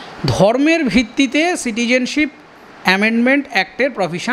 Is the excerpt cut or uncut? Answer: uncut